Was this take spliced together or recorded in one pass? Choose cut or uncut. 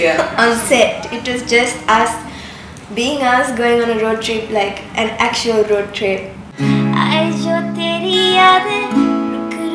cut